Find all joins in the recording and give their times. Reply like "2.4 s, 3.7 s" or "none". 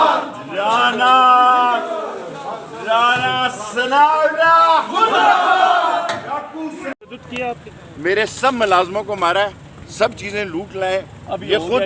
7.1 s